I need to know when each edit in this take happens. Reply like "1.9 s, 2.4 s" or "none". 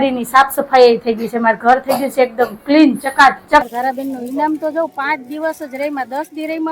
3.7 s

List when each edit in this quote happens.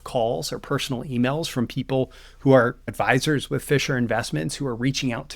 2.9 s

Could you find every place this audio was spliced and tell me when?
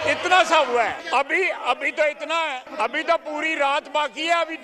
1.0 s, 2.7 s

